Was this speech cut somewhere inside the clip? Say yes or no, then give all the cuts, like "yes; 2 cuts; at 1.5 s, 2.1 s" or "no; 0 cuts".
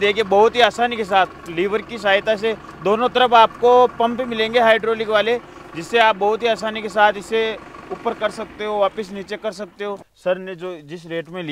yes; 1 cut; at 10.1 s